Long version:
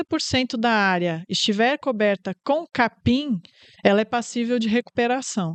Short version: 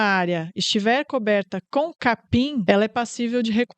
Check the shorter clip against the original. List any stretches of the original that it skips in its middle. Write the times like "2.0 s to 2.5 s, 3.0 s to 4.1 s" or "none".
3.4 s to 3.8 s